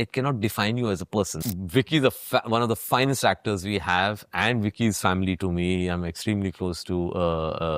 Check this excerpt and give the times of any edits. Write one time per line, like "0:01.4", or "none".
0:01.4